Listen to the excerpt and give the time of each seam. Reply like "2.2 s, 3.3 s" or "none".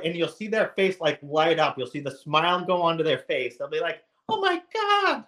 none